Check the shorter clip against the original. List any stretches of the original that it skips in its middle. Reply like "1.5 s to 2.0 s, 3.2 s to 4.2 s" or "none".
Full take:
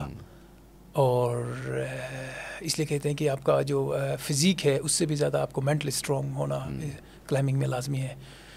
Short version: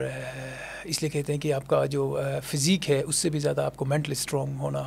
none